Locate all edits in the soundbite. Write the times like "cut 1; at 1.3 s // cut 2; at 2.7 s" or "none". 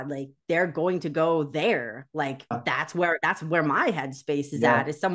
cut 1; at 2.5 s